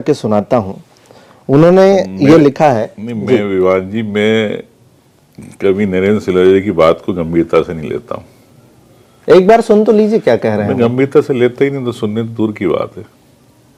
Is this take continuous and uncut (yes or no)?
yes